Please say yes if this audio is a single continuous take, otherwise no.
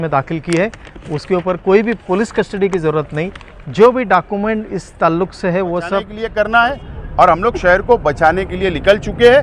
no